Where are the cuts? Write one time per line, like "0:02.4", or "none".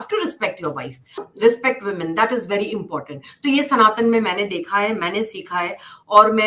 0:01.2

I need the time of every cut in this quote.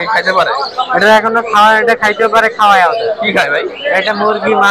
none

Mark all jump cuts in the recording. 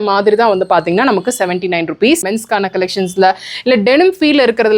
0:02.2

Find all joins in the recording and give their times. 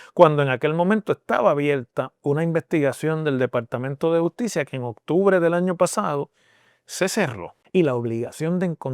0:07.5

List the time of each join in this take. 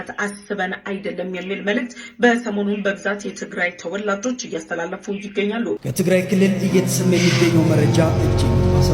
0:05.9

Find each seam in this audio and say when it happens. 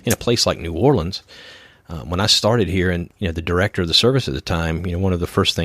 0:03.1

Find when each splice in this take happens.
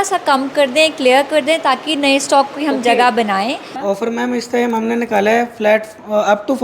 0:03.7

